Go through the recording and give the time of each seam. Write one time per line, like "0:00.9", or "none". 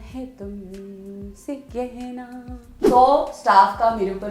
0:02.8